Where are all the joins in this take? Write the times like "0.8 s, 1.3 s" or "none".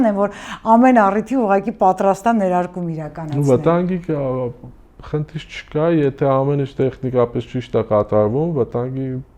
none